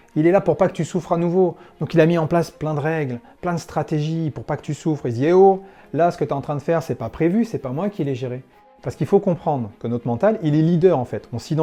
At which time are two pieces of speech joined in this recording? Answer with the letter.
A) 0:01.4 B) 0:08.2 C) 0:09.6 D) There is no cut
D